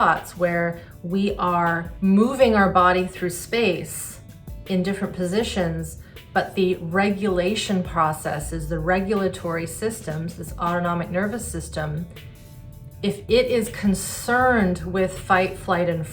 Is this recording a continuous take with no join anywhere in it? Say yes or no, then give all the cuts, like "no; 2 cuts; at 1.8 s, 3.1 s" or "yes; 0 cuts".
no; 1 cut; at 1.9 s